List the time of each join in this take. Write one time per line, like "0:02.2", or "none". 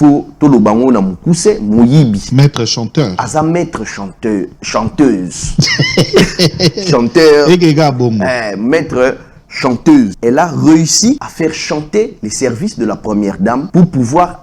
0:02.2
0:10.1
0:11.3
0:13.7